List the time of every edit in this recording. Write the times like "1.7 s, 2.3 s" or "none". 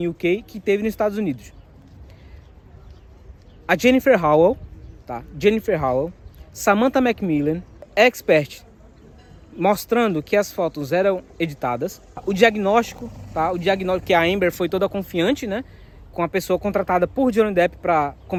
none